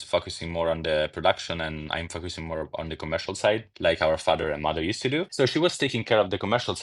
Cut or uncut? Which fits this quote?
uncut